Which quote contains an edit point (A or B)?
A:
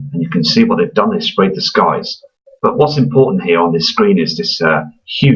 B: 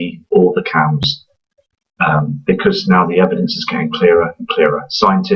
A